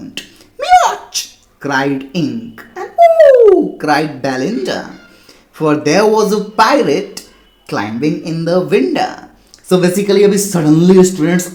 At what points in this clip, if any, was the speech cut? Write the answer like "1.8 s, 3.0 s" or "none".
none